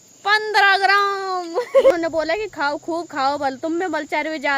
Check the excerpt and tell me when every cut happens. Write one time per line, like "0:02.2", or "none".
0:01.9